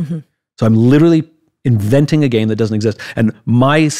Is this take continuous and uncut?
yes; 0 cuts

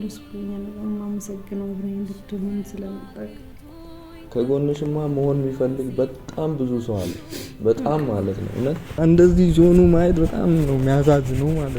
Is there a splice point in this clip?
yes; 1 cut; at 9.0 s

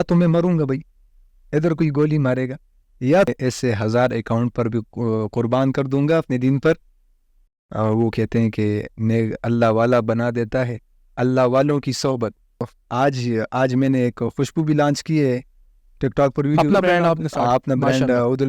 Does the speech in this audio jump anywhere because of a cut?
yes; 3 cuts; at 3.3 s, 7.4 s, 12.8 s

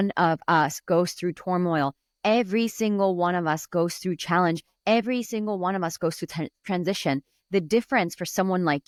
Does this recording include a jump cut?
no; 0 cuts

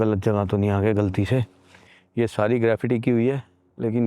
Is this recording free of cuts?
yes; 0 cuts

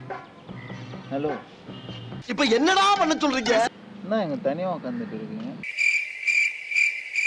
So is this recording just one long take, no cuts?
yes; 0 cuts

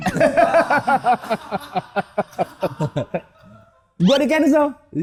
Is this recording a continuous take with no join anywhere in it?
yes; 0 cuts

